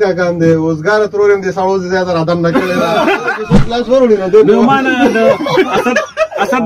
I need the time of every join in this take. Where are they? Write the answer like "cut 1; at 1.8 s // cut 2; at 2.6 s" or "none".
cut 1; at 3.5 s